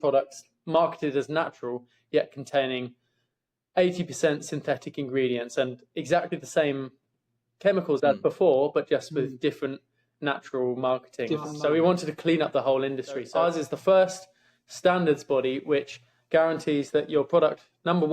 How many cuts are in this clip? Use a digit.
2